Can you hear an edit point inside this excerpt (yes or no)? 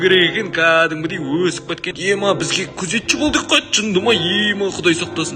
yes